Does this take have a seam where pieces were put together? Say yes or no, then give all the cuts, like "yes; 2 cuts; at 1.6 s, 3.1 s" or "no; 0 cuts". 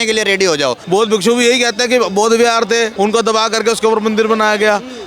yes; 2 cuts; at 0.8 s, 2.9 s